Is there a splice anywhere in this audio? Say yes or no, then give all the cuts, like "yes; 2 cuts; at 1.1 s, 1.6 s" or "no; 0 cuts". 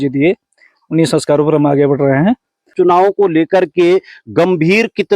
yes; 1 cut; at 2.7 s